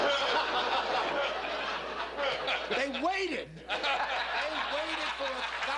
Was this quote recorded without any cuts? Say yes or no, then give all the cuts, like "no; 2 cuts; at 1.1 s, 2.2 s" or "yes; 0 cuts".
yes; 0 cuts